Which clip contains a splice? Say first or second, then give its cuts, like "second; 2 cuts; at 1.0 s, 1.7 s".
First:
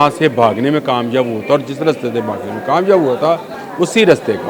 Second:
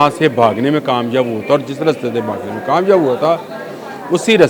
first; 1 cut; at 3.6 s